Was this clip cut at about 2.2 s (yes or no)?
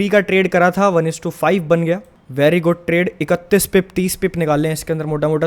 yes